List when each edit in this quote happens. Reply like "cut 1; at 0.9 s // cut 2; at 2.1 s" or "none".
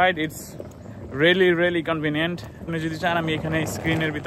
cut 1; at 2.7 s